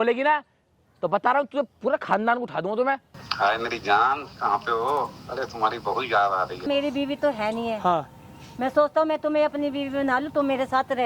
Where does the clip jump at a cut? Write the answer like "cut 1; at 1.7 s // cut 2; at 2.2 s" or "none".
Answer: cut 1; at 3.2 s // cut 2; at 6.7 s